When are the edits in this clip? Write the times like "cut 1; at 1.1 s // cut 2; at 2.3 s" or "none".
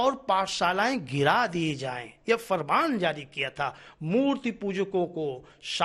none